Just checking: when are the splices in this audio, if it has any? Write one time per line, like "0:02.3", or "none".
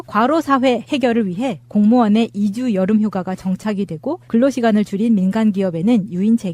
0:01.1